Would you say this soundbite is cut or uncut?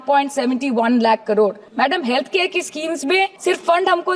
cut